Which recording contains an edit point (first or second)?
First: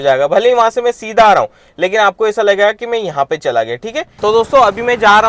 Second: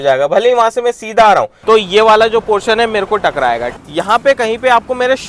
second